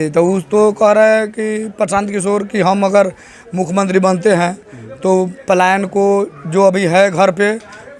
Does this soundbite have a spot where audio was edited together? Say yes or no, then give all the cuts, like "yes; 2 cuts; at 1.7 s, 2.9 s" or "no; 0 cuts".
no; 0 cuts